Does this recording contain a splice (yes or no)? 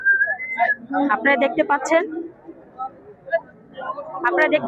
no